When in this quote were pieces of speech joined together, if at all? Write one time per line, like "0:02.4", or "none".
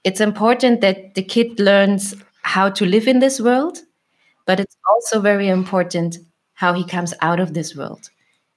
none